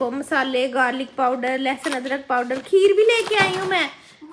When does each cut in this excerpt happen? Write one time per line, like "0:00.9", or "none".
none